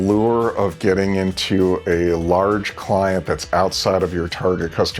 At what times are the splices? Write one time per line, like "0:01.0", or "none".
none